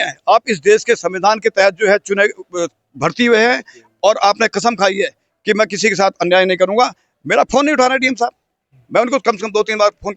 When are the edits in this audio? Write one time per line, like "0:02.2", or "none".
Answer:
none